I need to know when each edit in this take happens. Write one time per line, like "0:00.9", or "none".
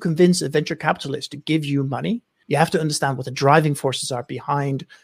0:02.3